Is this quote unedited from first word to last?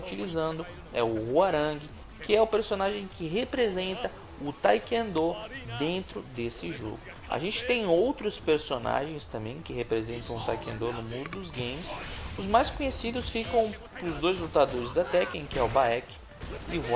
yes; 0 cuts

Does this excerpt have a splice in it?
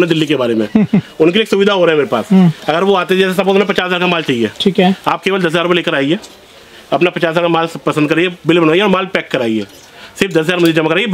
no; 0 cuts

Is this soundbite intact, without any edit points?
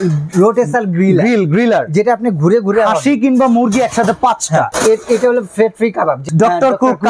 no; 2 cuts; at 4.7 s, 6.2 s

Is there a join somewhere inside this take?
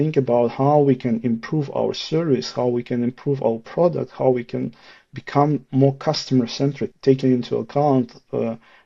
yes; 1 cut; at 6.9 s

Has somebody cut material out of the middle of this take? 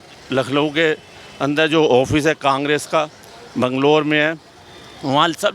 no; 0 cuts

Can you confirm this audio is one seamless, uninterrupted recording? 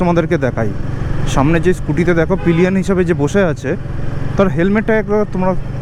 yes; 0 cuts

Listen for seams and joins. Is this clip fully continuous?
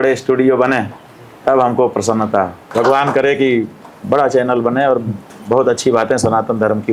no; 1 cut; at 2.6 s

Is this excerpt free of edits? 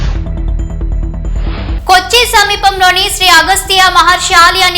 no; 1 cut; at 1.2 s

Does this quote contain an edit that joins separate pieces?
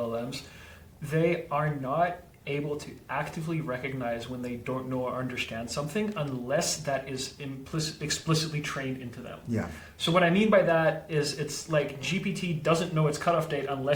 no; 0 cuts

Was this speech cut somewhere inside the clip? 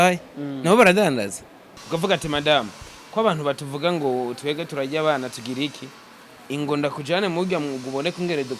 yes; 1 cut; at 1.8 s

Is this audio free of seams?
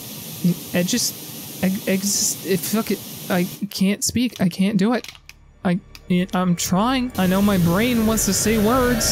yes; 0 cuts

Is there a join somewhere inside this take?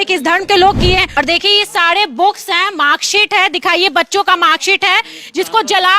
yes; 1 cut; at 1.1 s

